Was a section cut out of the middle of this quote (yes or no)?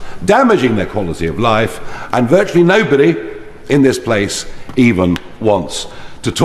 no